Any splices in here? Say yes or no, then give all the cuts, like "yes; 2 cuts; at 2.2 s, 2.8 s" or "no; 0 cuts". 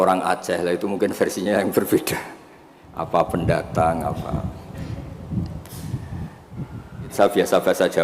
yes; 1 cut; at 7.1 s